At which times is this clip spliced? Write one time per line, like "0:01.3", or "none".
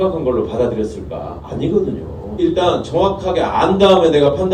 0:02.4